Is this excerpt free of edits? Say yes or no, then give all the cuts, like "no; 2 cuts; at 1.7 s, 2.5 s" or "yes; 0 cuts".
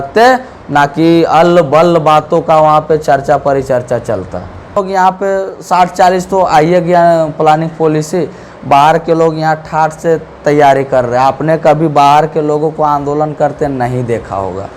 no; 1 cut; at 4.8 s